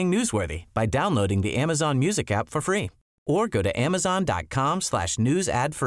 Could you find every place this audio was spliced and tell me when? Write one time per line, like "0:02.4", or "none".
none